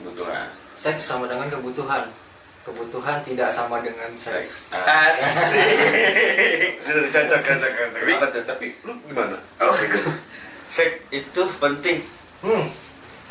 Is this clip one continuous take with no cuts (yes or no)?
no